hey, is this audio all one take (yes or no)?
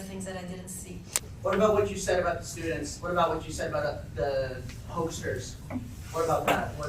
no